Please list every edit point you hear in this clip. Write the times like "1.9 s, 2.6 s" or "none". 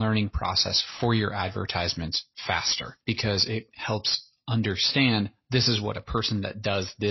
2.8 s